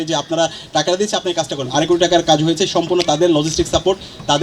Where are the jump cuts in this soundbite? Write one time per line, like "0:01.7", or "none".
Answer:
0:01.7